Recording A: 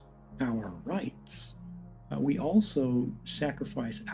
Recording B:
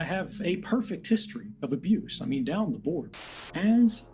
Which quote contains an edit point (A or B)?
B